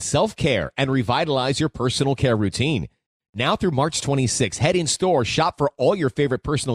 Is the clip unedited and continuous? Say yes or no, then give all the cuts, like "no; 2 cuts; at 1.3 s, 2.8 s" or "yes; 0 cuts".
yes; 0 cuts